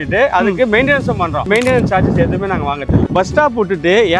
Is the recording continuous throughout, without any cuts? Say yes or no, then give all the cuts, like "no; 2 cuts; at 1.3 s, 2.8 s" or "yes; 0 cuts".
no; 1 cut; at 3.1 s